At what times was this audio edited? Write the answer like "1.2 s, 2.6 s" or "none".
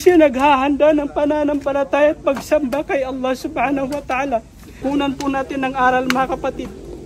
4.7 s

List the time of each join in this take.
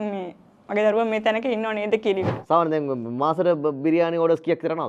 2.4 s

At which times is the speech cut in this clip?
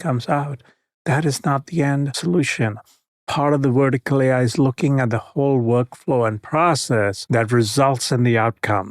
2.1 s, 7.2 s

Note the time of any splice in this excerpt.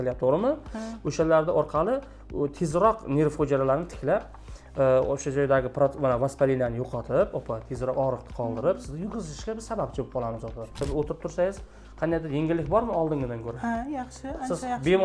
10.8 s

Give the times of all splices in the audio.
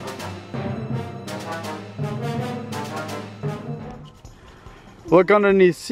4.1 s

